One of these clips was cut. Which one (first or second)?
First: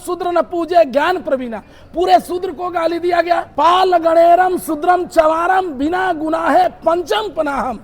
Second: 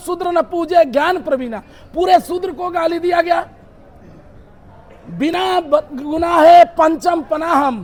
first